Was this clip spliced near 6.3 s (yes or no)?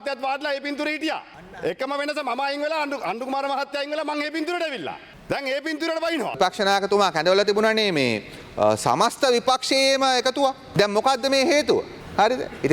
yes